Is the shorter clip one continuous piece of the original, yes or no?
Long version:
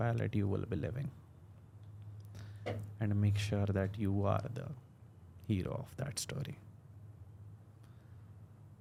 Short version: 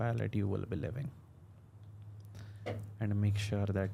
yes